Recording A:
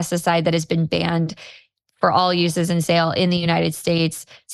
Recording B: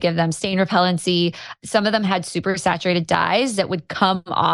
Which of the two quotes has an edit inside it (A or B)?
B